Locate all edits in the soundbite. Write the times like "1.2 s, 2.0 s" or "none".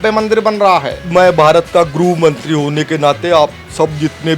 1.0 s